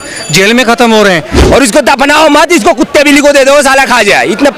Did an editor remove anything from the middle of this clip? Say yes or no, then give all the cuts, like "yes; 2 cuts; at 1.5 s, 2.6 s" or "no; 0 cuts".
yes; 1 cut; at 1.3 s